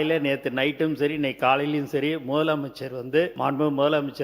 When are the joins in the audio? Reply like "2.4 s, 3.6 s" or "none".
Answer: 3.3 s